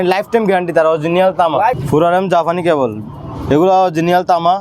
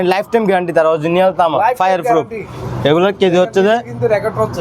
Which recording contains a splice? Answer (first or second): first